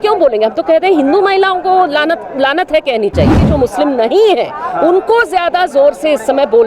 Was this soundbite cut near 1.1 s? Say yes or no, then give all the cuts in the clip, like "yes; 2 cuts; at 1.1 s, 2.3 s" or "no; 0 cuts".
no; 1 cut; at 3.4 s